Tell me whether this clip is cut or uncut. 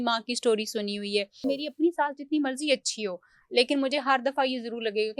cut